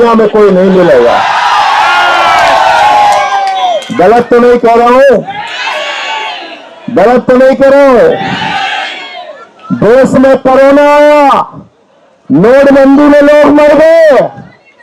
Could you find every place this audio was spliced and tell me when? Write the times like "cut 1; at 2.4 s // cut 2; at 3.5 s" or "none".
none